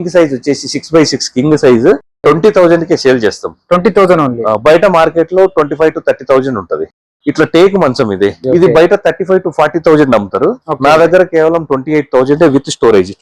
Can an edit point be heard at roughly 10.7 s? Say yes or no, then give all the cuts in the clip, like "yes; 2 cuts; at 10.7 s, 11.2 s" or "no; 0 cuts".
no; 1 cut; at 8.4 s